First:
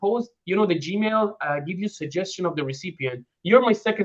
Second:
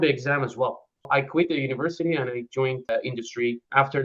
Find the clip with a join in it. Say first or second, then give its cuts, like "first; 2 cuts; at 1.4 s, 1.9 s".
second; 2 cuts; at 1.1 s, 3.1 s